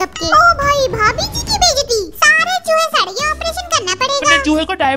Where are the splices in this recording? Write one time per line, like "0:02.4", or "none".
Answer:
none